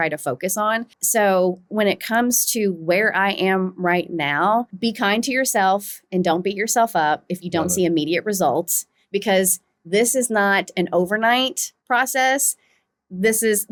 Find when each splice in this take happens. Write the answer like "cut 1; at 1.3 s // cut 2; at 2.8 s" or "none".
none